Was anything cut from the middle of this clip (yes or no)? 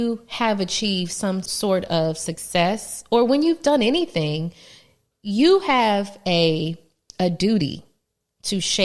yes